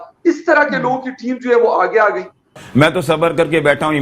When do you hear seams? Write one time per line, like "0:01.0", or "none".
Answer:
0:02.5